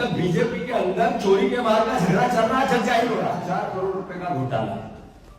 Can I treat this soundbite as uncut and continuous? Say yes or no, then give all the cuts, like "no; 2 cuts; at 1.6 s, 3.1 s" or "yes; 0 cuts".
no; 1 cut; at 3.4 s